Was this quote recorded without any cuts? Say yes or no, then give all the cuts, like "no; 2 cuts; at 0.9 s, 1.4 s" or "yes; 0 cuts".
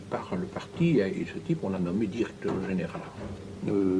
yes; 0 cuts